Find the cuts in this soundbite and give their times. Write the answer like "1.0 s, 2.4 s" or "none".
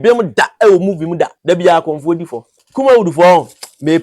1.4 s, 2.6 s